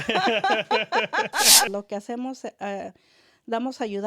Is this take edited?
yes; 1 cut; at 1.7 s

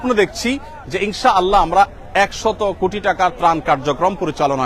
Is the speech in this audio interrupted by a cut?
no; 0 cuts

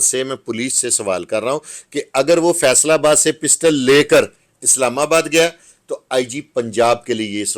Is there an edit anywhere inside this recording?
no; 0 cuts

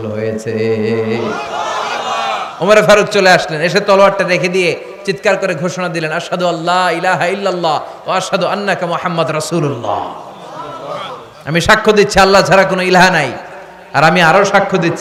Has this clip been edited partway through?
no; 0 cuts

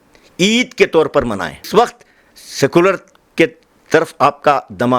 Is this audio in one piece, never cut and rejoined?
no; 1 cut; at 1.7 s

